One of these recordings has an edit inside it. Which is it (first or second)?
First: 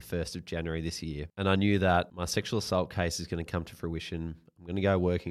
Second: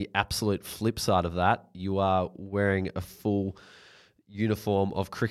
first